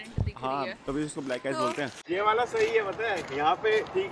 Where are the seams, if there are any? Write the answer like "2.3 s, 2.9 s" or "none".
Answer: 2.0 s